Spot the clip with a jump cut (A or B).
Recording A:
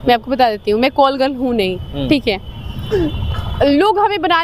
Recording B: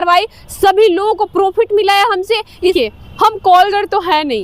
B